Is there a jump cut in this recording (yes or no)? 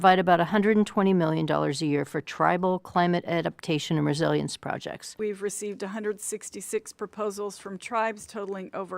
yes